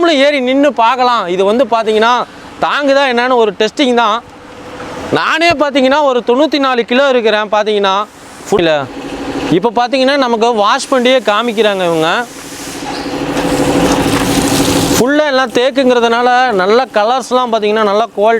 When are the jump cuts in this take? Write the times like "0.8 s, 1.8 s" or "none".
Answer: 8.6 s